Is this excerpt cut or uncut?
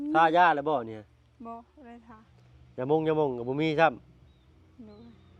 uncut